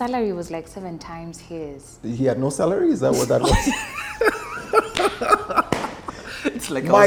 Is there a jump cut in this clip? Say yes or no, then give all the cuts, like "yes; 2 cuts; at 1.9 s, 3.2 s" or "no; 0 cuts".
no; 0 cuts